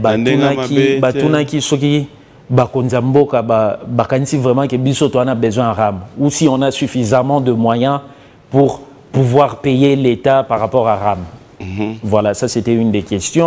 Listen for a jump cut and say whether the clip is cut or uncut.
uncut